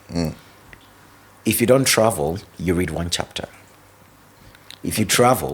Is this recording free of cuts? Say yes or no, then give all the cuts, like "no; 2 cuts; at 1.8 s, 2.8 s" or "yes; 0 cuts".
yes; 0 cuts